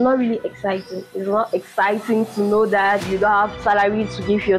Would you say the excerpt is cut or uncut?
cut